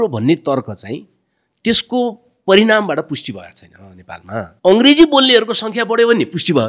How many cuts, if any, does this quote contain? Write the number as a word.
one